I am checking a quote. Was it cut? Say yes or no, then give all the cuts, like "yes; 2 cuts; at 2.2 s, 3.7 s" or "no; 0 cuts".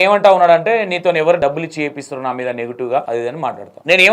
yes; 2 cuts; at 1.4 s, 3.3 s